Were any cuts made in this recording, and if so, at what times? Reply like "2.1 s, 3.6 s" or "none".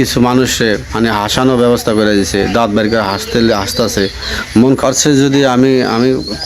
4.8 s